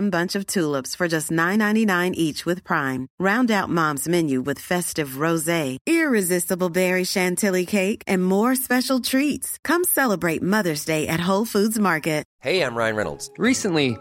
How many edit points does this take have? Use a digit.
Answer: 1